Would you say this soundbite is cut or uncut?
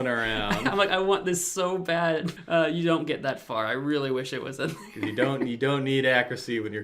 cut